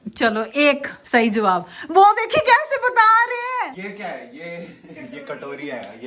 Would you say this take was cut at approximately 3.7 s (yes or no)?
yes